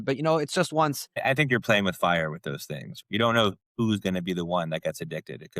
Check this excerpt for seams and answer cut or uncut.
cut